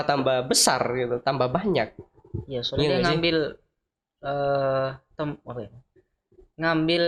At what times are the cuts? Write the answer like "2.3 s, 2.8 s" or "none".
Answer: none